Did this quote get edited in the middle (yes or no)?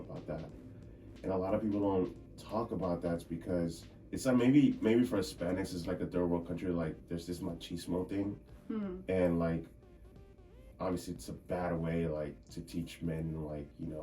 yes